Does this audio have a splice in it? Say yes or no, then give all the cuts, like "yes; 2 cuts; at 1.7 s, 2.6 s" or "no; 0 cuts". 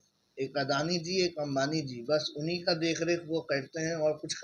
no; 0 cuts